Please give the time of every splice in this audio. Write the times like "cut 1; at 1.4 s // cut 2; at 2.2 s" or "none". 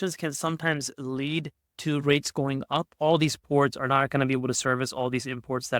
cut 1; at 2.9 s